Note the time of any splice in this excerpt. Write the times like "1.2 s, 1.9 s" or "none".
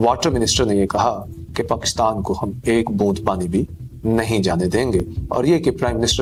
none